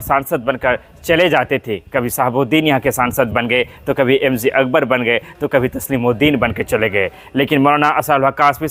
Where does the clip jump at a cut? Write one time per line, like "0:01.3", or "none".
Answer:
none